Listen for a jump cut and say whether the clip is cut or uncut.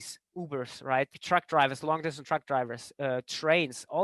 cut